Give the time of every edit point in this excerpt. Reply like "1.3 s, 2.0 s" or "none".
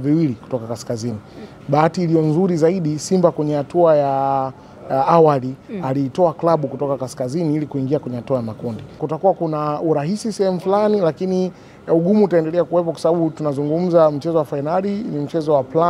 9.1 s